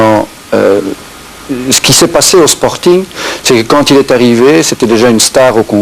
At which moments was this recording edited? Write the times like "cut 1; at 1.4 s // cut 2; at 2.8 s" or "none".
cut 1; at 1.6 s

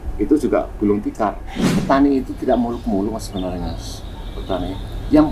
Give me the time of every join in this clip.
cut 1; at 1.8 s

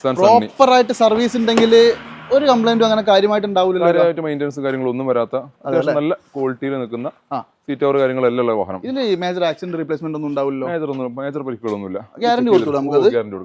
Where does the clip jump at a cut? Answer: none

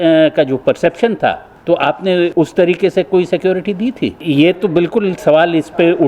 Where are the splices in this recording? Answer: cut 1; at 1.5 s // cut 2; at 2.3 s // cut 3; at 4.2 s

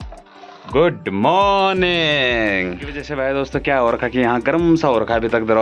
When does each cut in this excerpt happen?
cut 1; at 3.0 s

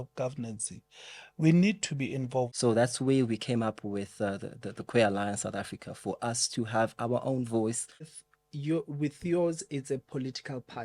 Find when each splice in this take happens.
cut 1; at 2.5 s // cut 2; at 8.1 s

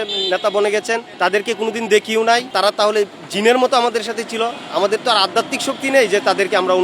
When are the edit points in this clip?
cut 1; at 2.5 s

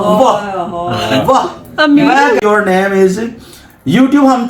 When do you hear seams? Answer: cut 1; at 2.4 s

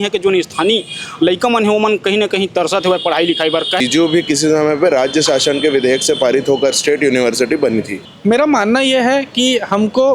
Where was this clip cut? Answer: cut 1; at 3.8 s // cut 2; at 8.0 s

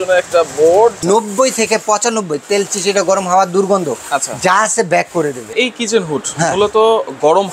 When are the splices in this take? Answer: cut 1; at 1.0 s // cut 2; at 5.5 s

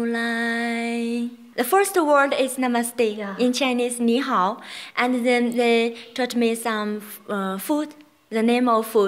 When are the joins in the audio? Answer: cut 1; at 1.4 s

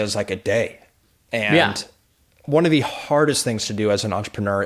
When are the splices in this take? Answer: none

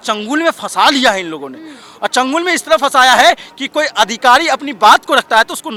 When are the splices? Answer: none

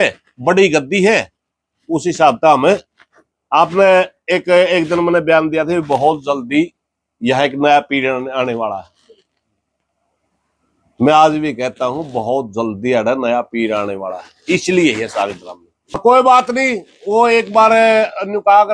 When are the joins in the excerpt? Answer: cut 1; at 16.0 s

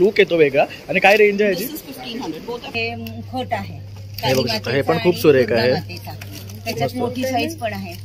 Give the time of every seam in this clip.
cut 1; at 2.7 s

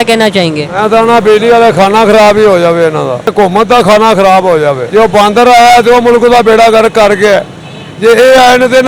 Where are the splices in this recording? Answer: cut 1; at 3.3 s // cut 2; at 4.8 s

